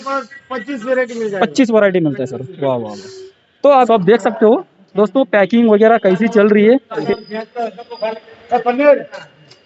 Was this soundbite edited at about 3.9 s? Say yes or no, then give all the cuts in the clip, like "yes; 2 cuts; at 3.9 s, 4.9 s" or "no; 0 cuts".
yes; 2 cuts; at 3.9 s, 7.0 s